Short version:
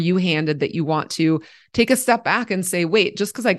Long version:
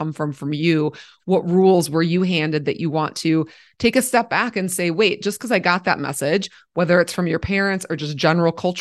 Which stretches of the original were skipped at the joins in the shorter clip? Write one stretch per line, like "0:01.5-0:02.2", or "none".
none